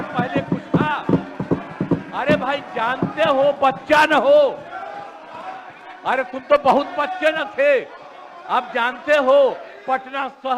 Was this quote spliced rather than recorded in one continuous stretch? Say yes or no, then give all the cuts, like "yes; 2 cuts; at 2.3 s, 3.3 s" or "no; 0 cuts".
no; 0 cuts